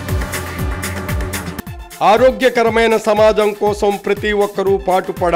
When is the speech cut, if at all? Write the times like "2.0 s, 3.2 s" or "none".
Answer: none

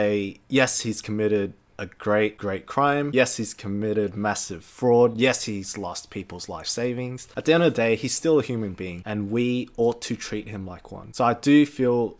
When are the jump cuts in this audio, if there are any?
3.1 s, 7.2 s

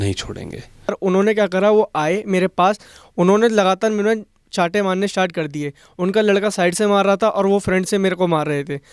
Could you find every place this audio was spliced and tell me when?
0.9 s

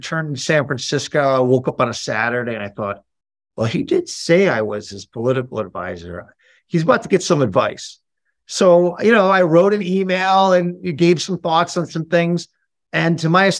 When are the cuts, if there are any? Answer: none

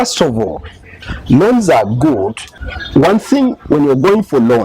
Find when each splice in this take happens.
2.5 s

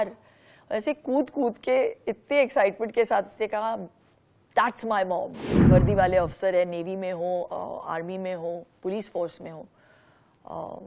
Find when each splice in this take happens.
5.5 s

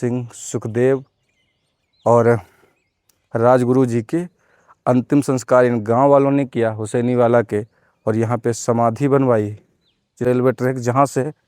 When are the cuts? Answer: 10.3 s

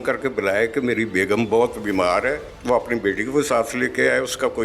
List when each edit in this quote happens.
2.5 s

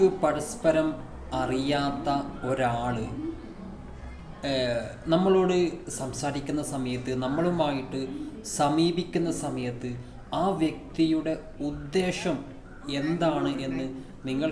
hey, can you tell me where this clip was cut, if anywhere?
none

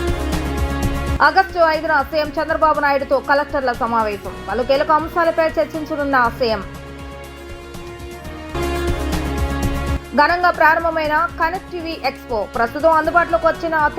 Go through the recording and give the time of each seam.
1.2 s

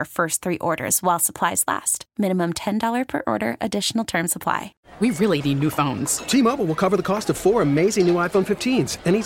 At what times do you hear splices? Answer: 4.8 s

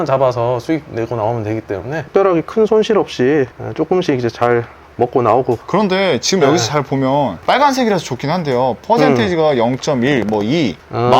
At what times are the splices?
2.0 s, 5.6 s

